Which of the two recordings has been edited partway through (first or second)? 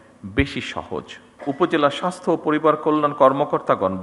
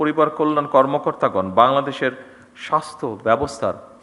first